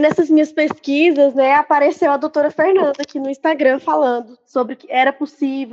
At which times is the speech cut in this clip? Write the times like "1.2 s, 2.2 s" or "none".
none